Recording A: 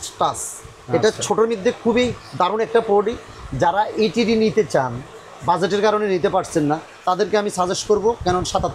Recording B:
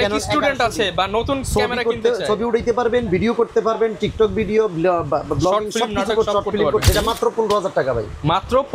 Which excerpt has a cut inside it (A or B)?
B